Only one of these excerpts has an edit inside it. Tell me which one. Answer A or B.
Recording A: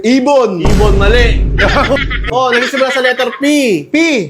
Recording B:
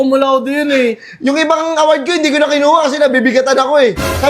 A